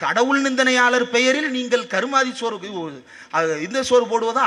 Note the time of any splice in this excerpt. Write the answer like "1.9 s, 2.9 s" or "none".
none